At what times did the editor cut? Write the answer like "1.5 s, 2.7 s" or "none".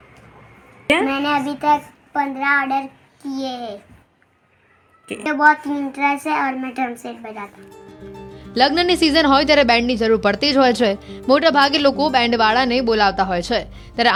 none